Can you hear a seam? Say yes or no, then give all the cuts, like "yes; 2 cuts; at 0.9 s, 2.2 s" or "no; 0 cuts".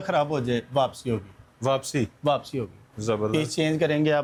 no; 0 cuts